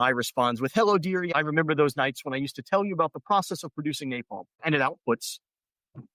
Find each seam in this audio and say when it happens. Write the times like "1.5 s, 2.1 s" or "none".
1.3 s, 4.6 s